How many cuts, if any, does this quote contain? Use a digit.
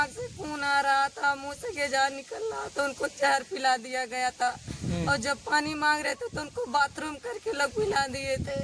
0